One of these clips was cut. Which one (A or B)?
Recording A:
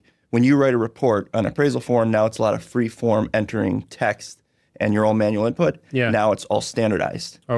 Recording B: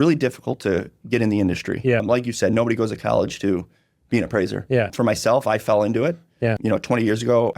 B